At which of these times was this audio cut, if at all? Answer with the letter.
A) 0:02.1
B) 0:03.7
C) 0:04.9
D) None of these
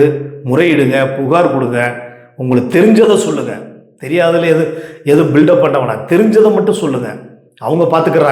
D